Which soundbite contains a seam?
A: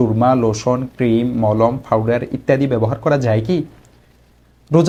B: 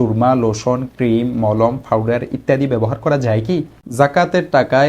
B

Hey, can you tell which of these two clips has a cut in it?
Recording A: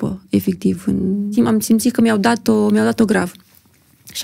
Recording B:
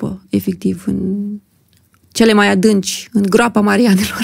A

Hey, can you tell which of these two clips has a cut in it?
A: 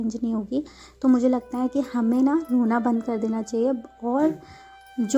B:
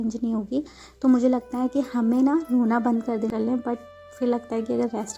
B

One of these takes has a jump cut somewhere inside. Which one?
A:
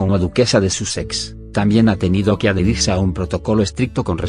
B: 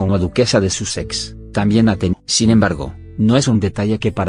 A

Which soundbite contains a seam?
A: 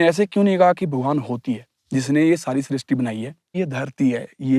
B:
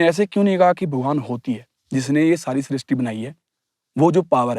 A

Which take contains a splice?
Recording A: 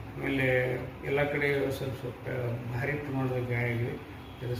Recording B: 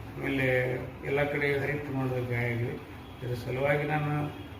B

